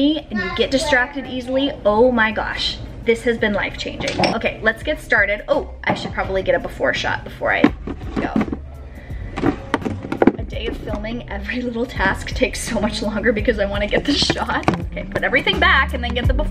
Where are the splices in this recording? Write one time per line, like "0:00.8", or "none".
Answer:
none